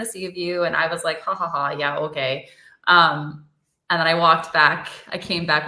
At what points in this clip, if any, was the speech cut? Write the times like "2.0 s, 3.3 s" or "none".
none